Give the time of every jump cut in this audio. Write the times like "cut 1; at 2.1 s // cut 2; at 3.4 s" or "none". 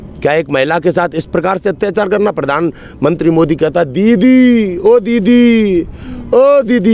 none